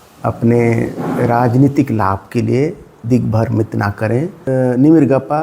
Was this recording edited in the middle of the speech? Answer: yes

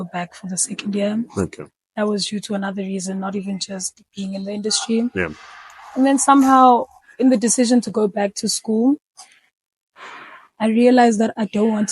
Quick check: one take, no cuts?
yes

